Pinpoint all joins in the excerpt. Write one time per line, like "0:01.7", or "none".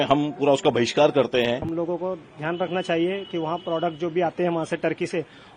0:01.6